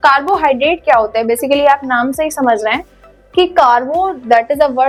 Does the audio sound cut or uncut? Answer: uncut